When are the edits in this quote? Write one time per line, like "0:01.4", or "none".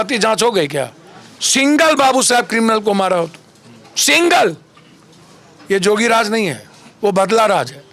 none